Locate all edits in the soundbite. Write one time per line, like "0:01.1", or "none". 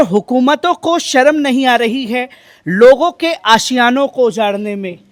none